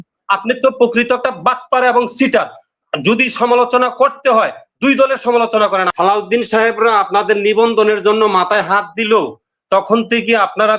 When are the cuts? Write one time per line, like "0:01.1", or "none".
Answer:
0:05.9